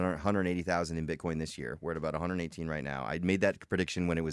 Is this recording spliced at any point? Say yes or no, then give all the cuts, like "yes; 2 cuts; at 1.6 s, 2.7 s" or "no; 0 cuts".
no; 0 cuts